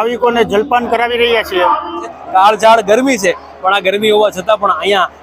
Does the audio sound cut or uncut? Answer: cut